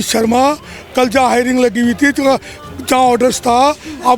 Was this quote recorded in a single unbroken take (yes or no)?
yes